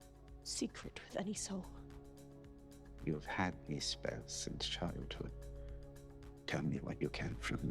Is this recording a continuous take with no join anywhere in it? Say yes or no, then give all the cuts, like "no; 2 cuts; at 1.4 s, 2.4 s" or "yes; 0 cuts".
no; 1 cut; at 1.8 s